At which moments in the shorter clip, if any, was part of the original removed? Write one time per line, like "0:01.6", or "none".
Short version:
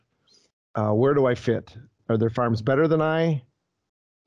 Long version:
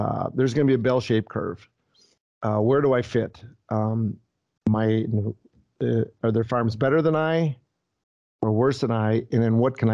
0:02.0